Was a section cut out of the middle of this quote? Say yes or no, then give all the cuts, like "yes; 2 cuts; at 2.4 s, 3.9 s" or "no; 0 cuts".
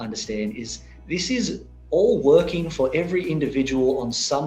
no; 0 cuts